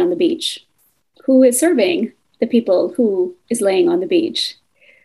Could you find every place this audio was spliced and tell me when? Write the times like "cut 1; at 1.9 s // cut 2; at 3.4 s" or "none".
none